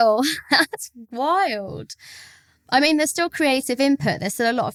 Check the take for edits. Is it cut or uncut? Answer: uncut